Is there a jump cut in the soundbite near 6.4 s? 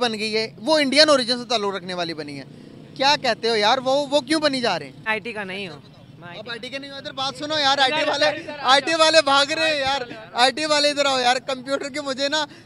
no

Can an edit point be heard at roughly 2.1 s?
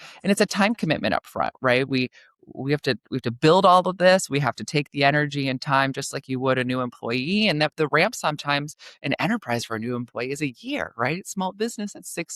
no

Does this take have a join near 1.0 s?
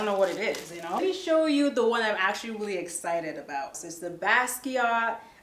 yes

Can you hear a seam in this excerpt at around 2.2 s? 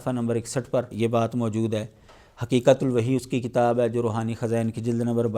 no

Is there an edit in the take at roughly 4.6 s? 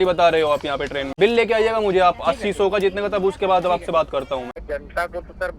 yes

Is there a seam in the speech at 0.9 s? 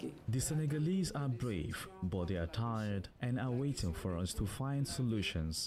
no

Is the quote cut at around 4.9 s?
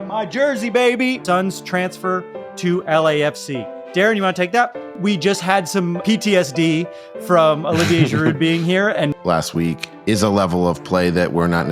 yes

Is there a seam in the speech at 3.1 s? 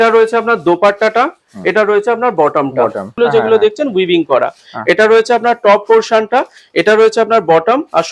yes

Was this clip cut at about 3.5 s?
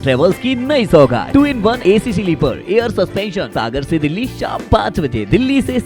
yes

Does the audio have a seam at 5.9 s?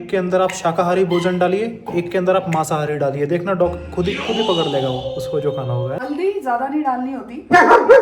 yes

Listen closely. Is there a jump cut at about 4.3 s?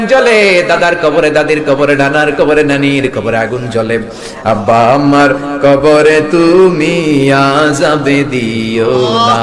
no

